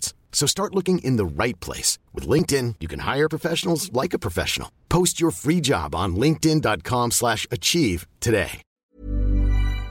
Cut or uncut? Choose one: cut